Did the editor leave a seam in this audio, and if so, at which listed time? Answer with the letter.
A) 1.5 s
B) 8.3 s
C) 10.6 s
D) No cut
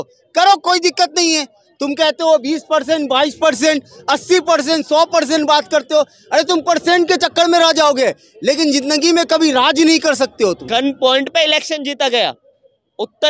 C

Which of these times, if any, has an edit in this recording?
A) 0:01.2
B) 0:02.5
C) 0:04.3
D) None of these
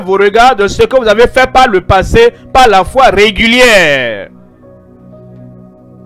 C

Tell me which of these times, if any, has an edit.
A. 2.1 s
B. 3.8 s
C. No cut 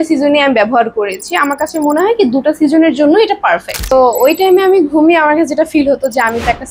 B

